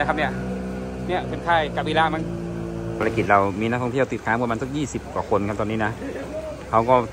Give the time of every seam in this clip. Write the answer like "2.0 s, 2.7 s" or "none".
3.0 s